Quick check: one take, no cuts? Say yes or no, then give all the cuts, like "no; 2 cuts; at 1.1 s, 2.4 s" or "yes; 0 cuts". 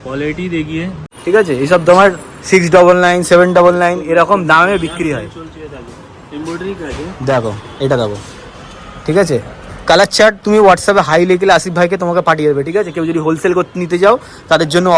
no; 1 cut; at 1.1 s